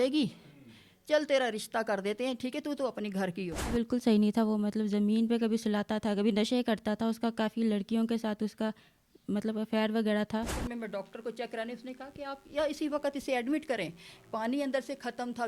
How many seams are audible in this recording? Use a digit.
2